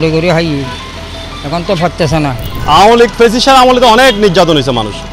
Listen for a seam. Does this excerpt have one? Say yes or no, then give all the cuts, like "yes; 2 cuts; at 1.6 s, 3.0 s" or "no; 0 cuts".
yes; 1 cut; at 2.5 s